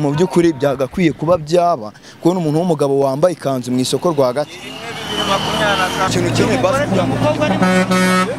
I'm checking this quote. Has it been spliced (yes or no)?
yes